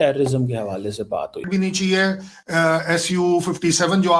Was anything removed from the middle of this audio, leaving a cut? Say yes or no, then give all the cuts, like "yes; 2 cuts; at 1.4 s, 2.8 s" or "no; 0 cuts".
yes; 1 cut; at 1.5 s